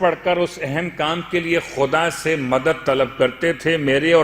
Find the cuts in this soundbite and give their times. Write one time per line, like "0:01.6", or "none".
none

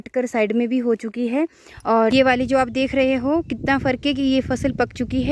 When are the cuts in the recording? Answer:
0:02.1

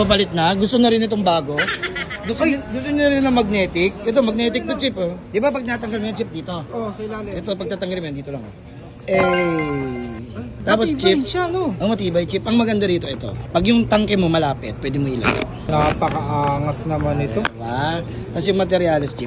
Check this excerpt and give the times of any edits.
none

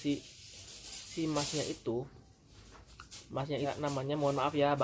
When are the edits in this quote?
0:03.7

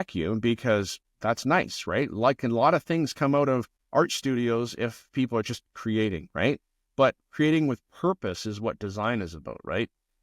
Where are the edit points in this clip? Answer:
0:01.0
0:03.8

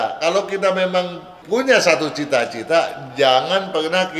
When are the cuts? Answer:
0:01.3

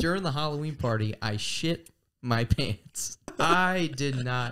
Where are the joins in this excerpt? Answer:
0:03.4

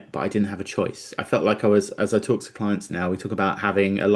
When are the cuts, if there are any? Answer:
none

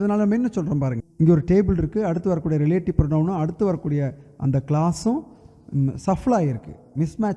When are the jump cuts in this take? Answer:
0:01.0

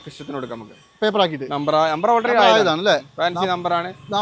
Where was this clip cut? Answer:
none

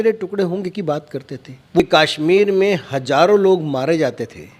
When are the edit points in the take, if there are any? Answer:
0:01.8

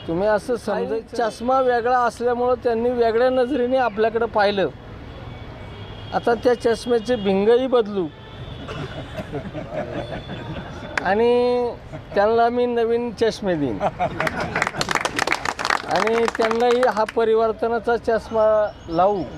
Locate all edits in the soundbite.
0:01.0

